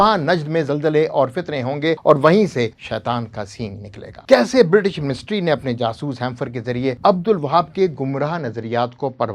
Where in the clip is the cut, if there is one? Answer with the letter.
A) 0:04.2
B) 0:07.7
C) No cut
A